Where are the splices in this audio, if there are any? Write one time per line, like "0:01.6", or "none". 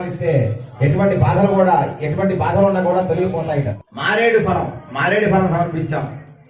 0:03.7